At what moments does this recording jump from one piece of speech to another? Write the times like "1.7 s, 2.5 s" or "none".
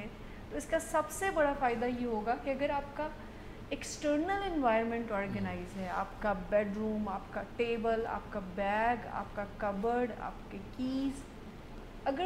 none